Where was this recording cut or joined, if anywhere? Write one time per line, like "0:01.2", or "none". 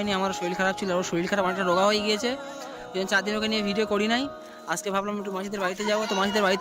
none